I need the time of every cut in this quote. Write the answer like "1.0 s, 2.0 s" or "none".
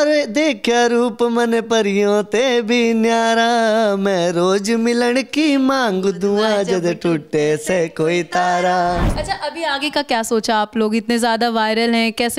9.1 s